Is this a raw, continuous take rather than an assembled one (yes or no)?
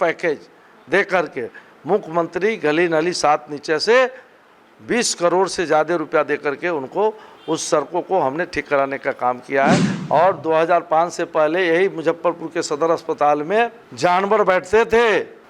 no